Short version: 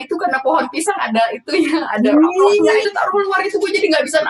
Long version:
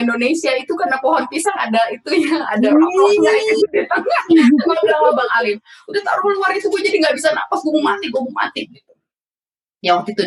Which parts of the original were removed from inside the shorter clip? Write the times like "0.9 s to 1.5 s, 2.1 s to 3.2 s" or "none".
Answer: 3.4 s to 6.0 s